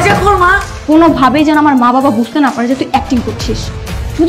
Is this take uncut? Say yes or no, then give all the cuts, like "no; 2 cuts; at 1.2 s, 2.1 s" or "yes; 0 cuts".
yes; 0 cuts